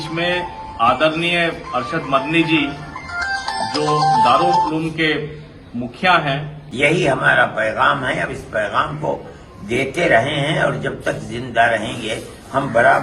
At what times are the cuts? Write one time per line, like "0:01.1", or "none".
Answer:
0:06.6